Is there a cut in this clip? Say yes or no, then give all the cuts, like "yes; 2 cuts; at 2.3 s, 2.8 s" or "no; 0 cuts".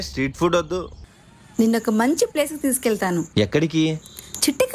yes; 1 cut; at 1.0 s